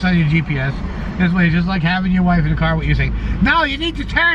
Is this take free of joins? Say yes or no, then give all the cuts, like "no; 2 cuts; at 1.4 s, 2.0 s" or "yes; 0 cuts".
yes; 0 cuts